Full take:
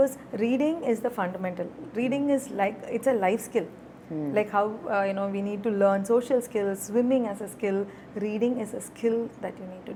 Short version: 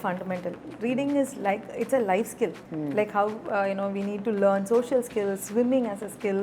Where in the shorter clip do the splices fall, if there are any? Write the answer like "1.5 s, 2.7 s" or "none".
2.7 s